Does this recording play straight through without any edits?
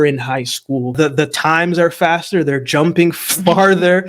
no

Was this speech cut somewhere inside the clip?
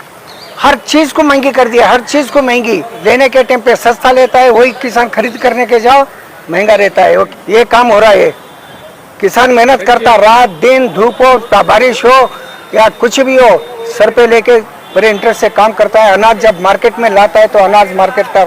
yes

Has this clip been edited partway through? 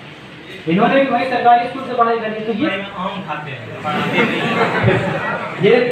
yes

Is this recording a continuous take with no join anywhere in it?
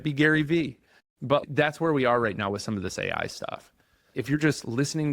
no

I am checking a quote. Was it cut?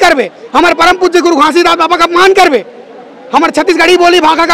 no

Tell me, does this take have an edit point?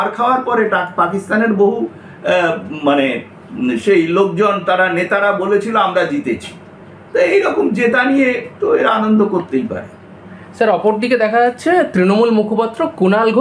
no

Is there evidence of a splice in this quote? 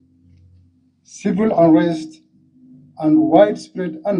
no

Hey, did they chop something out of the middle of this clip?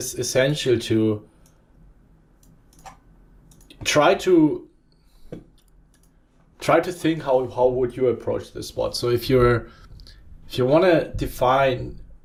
no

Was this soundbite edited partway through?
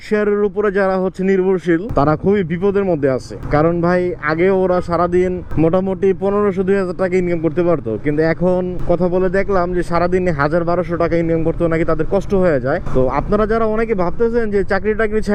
no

